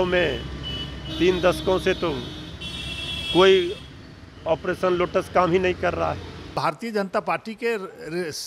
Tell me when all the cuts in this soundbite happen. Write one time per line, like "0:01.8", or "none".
0:06.5